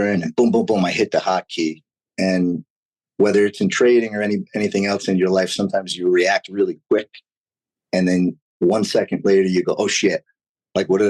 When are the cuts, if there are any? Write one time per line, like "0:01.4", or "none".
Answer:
none